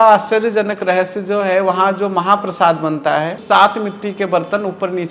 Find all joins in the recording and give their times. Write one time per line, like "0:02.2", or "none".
0:03.4